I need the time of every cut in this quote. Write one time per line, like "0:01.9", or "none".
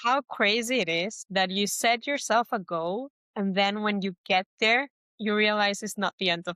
0:01.2
0:03.2
0:05.0

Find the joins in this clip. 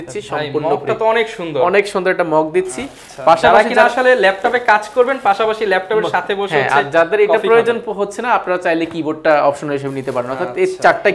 none

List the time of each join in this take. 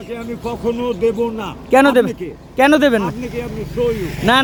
none

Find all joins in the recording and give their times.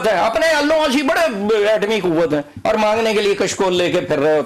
none

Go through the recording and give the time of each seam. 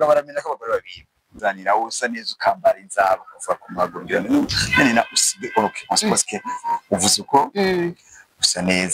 0:01.3

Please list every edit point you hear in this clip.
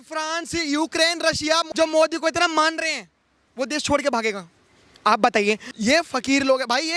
0:03.4
0:05.7

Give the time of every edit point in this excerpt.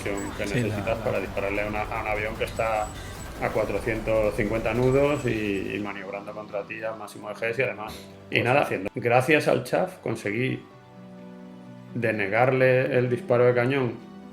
0:08.4

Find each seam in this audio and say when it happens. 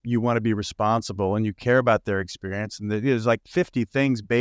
0:03.5

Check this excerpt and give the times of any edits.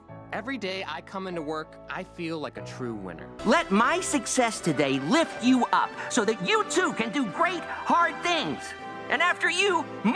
0:03.4

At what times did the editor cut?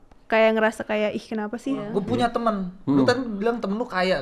0:01.9

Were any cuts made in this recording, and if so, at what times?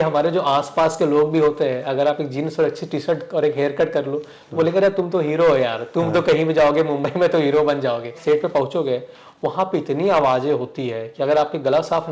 0:08.2

